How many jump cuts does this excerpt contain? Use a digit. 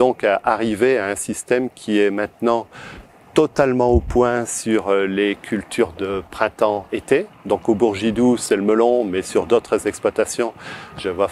0